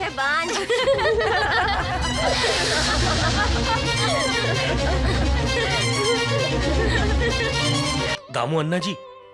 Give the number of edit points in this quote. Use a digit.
1